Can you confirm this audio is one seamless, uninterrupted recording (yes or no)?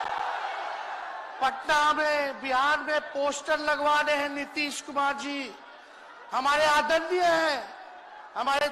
yes